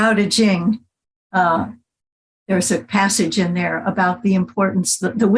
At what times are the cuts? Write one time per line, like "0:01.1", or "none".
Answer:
none